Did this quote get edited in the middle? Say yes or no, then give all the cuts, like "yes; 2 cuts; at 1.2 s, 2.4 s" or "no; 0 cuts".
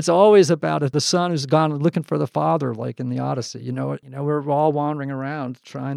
yes; 2 cuts; at 0.9 s, 4.0 s